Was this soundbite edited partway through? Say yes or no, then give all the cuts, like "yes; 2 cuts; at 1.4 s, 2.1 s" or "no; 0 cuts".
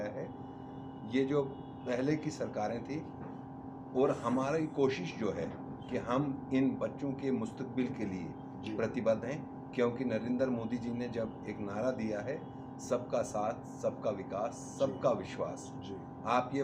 no; 0 cuts